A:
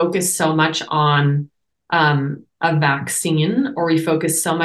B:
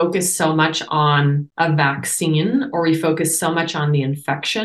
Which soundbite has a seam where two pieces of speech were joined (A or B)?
B